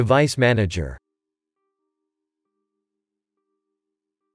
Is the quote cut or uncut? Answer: cut